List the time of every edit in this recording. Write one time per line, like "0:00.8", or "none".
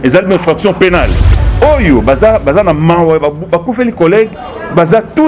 0:01.3